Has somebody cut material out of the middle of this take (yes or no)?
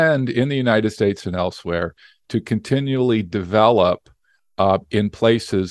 no